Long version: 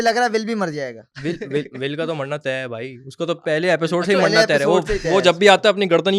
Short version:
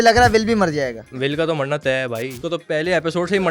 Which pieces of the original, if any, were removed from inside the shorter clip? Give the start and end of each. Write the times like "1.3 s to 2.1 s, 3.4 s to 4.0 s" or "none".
1.1 s to 1.7 s, 3.0 s to 3.1 s